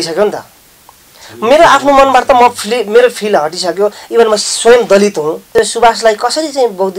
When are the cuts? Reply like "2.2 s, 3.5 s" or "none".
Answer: 5.6 s